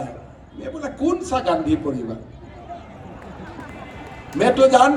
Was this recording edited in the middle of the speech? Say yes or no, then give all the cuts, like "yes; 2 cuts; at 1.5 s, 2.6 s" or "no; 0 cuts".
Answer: no; 0 cuts